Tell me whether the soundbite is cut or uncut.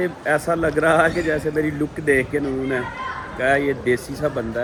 uncut